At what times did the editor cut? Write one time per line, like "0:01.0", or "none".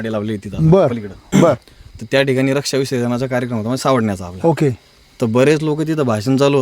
none